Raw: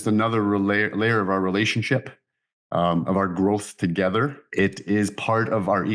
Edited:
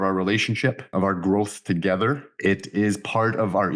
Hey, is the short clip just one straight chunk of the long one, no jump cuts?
no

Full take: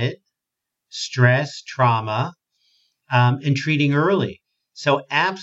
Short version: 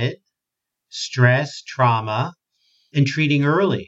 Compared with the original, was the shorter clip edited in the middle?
yes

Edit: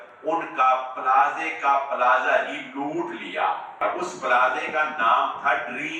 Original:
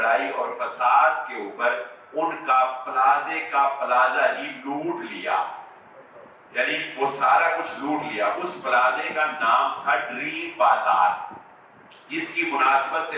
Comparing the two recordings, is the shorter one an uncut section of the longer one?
no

